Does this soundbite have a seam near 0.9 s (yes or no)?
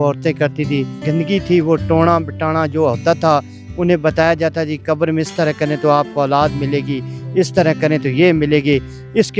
yes